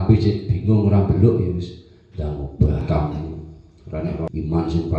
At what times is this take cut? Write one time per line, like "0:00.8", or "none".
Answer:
0:02.8

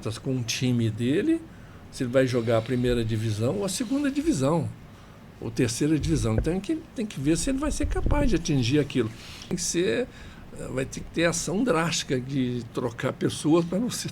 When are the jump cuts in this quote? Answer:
0:09.5

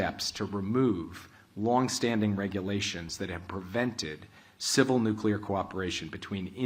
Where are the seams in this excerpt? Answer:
none

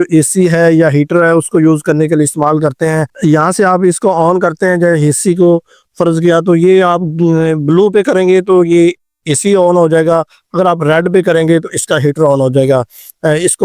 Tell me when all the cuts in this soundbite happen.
none

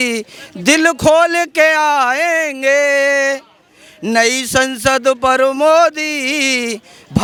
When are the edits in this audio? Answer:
none

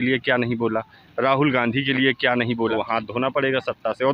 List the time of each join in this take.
0:02.7

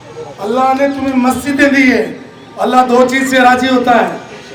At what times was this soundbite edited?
none

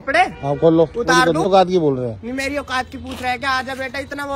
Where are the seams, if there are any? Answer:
0:01.5

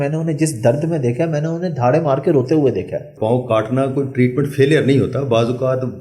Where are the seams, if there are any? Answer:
0:03.1

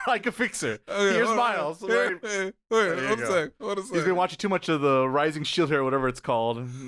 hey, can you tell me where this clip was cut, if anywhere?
none

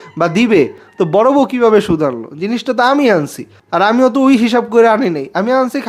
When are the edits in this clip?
none

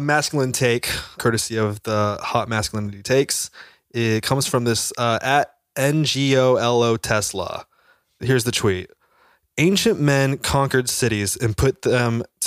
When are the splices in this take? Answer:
0:01.2

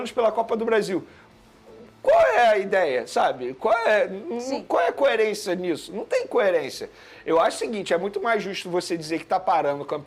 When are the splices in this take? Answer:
none

